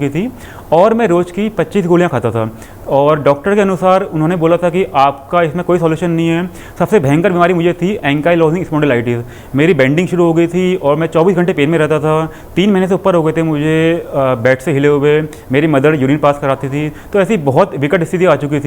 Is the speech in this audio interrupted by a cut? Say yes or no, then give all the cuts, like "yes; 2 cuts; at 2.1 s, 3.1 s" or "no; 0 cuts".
no; 0 cuts